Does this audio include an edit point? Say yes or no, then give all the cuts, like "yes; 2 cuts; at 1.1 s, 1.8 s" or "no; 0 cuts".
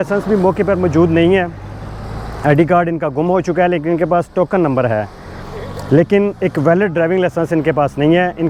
no; 0 cuts